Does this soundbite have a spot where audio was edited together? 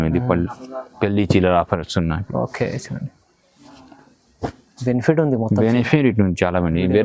no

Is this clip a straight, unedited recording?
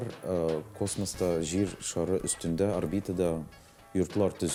yes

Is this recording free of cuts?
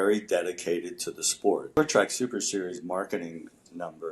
no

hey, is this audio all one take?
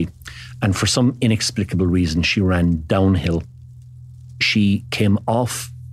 no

